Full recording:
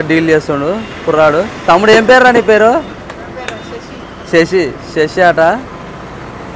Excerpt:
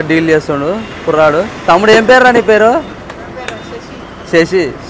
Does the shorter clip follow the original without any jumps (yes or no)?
yes